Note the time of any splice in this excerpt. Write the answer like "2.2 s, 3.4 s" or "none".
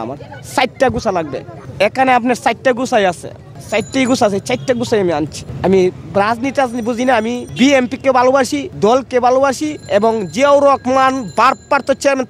5.4 s